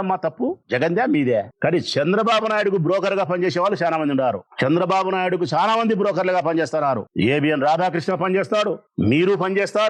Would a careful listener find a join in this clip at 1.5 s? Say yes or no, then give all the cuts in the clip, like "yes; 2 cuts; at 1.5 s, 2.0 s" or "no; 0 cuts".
yes; 1 cut; at 1.5 s